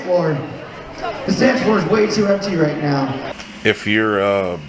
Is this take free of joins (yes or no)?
no